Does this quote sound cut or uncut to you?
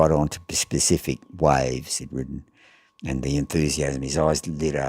cut